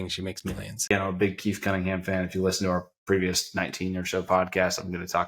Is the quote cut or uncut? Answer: cut